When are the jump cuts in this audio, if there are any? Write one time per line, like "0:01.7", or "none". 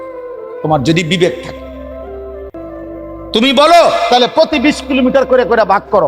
none